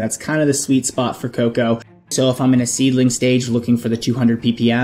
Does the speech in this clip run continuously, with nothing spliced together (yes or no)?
no